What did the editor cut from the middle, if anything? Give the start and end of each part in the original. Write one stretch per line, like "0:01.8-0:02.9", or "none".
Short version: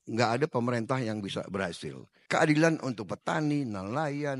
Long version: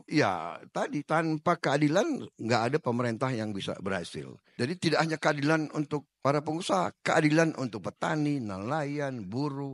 0:04.5-0:06.9